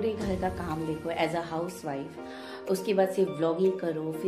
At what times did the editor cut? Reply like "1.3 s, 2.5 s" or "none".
none